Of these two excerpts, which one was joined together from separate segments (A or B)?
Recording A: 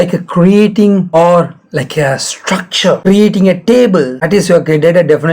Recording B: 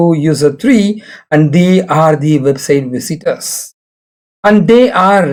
A